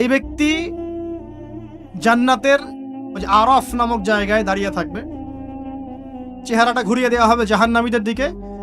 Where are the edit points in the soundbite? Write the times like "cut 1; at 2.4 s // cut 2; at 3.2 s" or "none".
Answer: cut 1; at 4.8 s // cut 2; at 6.5 s